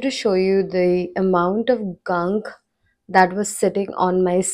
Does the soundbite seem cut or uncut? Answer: uncut